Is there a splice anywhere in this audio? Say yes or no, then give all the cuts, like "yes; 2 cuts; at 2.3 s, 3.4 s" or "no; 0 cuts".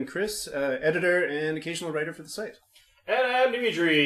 no; 0 cuts